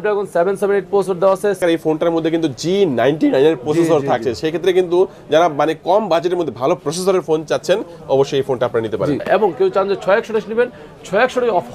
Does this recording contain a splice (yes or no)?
yes